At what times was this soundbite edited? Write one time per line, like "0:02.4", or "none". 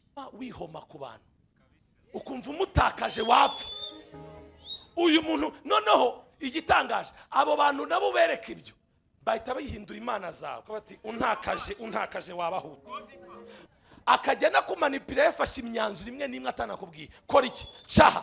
0:13.6